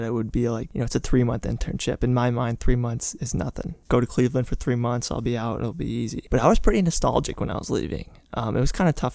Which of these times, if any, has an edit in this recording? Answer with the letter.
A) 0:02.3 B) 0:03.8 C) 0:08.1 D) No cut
B